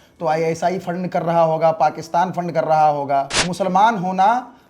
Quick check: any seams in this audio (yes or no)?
yes